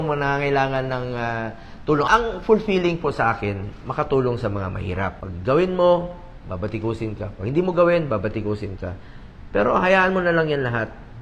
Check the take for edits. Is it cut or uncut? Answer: cut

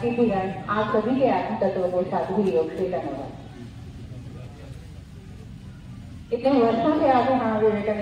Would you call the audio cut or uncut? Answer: uncut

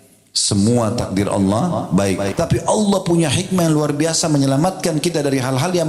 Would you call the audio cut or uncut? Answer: cut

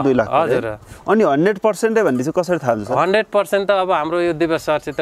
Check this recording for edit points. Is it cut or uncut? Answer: uncut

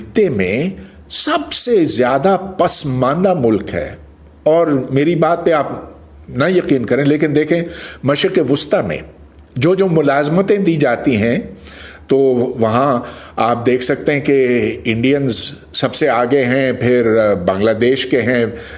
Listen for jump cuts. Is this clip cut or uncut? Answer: uncut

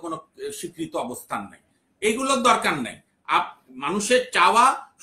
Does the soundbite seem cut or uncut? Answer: uncut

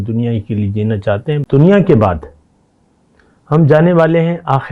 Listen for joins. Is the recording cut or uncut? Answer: cut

